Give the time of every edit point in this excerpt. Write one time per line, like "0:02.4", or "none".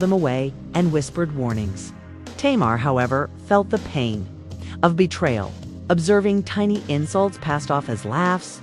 none